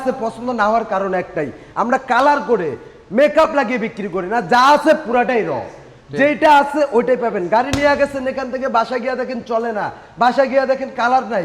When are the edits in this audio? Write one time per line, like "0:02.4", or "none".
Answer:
none